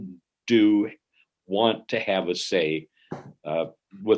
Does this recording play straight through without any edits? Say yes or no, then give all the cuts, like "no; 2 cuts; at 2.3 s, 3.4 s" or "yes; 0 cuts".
yes; 0 cuts